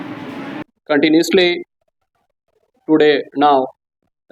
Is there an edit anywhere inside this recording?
no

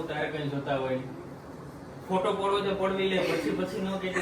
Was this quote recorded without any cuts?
yes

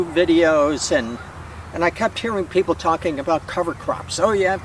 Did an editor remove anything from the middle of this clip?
no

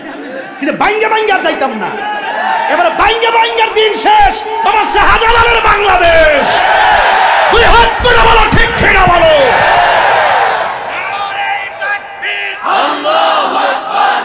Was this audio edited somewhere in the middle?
no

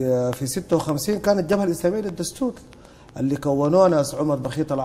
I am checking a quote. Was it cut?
no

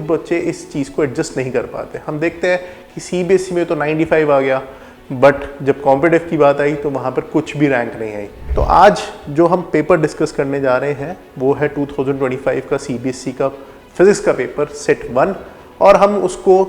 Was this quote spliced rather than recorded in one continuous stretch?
yes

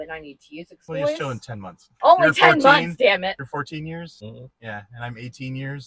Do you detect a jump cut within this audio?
yes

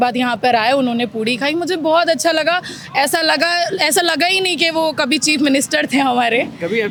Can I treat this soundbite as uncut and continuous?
yes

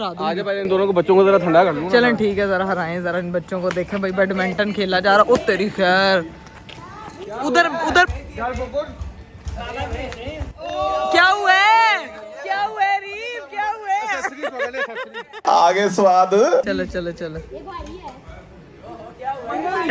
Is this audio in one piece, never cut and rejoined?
yes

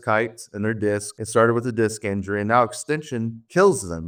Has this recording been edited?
no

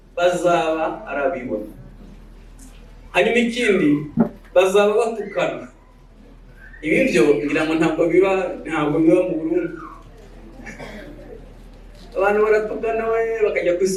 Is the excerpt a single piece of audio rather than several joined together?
yes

